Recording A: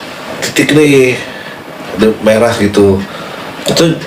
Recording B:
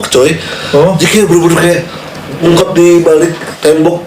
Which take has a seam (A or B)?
B